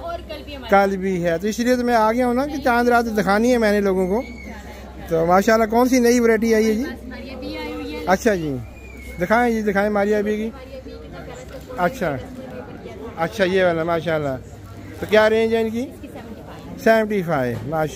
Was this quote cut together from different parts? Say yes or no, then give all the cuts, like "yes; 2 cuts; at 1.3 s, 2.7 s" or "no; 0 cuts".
no; 0 cuts